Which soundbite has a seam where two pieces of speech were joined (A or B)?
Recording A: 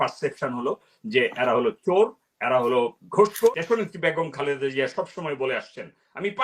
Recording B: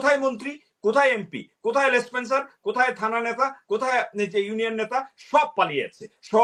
A